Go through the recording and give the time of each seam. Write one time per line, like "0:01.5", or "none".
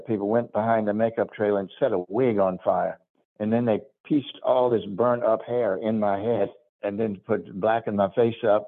none